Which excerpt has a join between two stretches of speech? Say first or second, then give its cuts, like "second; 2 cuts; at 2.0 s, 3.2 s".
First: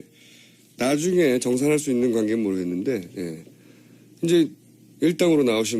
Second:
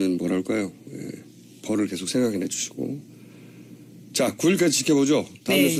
first; 1 cut; at 2.0 s